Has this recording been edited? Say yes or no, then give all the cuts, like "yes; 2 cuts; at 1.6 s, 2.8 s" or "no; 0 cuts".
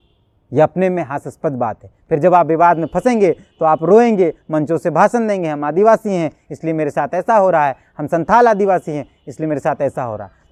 no; 0 cuts